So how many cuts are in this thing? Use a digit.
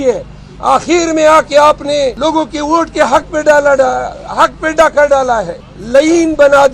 2